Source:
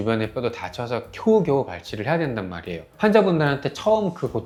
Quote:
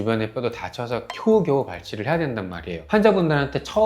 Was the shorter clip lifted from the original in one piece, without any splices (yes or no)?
no